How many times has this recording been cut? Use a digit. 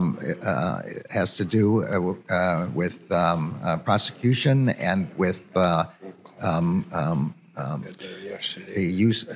0